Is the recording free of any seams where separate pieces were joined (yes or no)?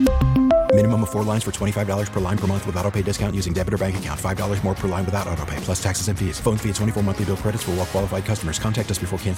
yes